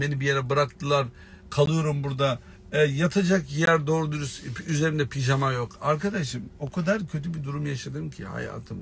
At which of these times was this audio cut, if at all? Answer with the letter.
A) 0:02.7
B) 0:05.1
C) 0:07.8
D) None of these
D